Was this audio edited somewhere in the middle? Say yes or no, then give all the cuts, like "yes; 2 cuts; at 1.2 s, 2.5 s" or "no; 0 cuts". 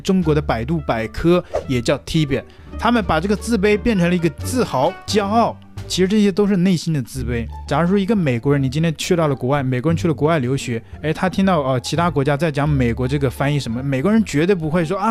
yes; 1 cut; at 2.6 s